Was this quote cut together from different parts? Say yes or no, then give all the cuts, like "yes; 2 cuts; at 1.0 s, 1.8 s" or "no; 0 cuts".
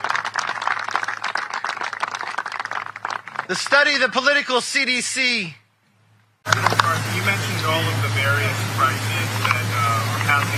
yes; 1 cut; at 6.4 s